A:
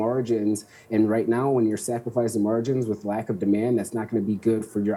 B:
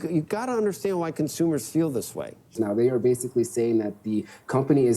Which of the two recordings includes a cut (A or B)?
B